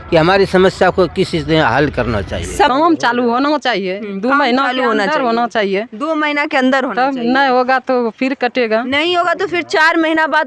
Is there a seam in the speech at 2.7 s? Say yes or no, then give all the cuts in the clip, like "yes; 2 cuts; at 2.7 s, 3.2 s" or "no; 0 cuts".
yes; 1 cut; at 2.7 s